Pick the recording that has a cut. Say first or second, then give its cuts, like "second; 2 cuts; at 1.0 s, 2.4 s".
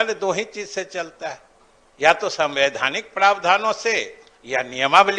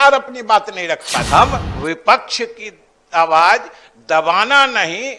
second; 1 cut; at 1.1 s